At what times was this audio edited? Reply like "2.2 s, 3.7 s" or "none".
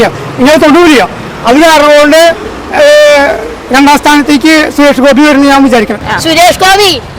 6.0 s